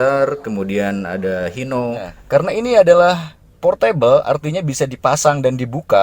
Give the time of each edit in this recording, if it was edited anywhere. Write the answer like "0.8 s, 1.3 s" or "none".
2.1 s